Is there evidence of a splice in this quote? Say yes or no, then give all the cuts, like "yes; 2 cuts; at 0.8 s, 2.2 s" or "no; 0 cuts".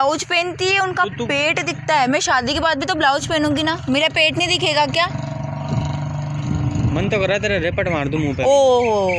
no; 0 cuts